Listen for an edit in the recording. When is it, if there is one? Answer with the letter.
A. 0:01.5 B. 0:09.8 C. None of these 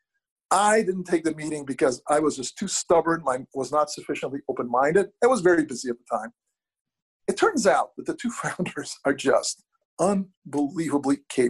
B